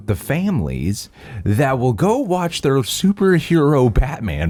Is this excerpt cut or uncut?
uncut